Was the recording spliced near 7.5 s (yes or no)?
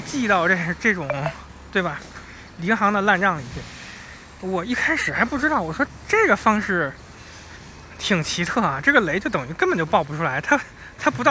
no